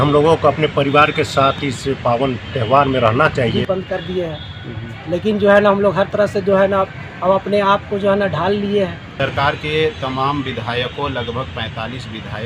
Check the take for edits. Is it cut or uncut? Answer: cut